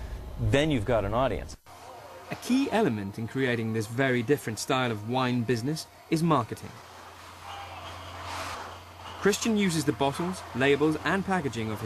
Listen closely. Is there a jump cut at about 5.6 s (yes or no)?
yes